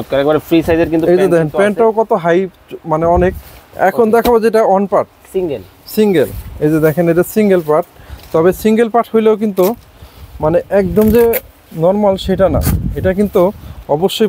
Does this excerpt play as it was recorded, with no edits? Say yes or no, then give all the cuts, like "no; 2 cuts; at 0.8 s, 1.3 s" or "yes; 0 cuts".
no; 1 cut; at 3.7 s